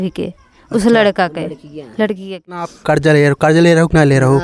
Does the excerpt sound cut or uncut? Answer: cut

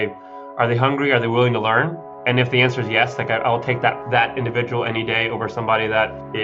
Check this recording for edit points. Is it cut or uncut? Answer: uncut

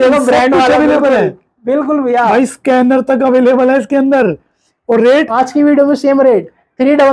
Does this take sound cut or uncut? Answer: cut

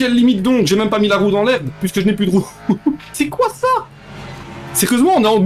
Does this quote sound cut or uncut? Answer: cut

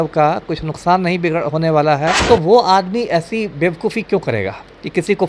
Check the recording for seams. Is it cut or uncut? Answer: cut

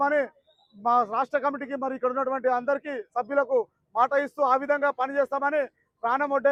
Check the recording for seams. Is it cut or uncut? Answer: uncut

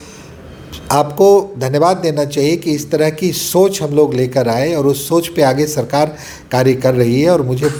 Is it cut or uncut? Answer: uncut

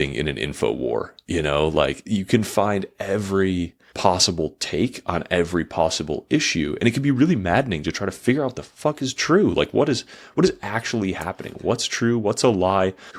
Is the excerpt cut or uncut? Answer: uncut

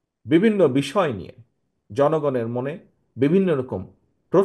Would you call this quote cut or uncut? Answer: uncut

